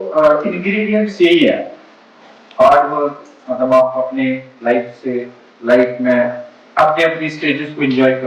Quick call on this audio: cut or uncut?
uncut